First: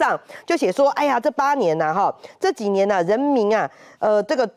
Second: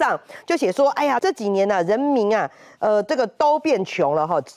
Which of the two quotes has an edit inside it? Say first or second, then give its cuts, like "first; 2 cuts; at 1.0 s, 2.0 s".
second; 1 cut; at 1.2 s